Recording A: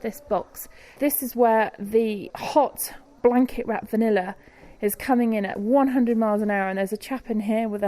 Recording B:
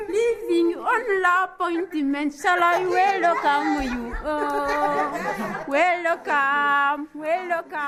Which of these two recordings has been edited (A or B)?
A